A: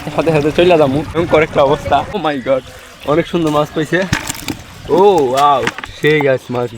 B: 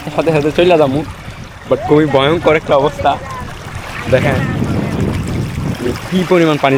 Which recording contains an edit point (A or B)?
A